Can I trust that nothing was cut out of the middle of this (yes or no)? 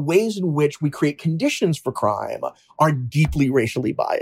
yes